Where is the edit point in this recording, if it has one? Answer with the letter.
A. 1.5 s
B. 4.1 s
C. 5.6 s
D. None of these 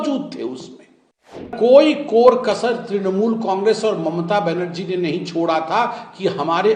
A